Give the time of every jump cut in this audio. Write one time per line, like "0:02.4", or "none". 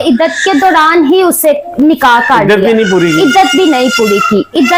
none